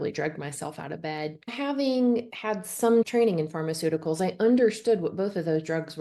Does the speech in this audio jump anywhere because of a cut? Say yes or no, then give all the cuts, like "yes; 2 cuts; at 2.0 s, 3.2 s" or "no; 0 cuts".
yes; 1 cut; at 1.4 s